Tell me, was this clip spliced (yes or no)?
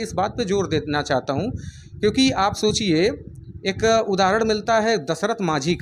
no